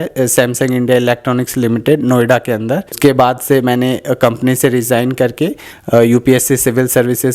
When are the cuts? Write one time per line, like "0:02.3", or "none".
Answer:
0:03.0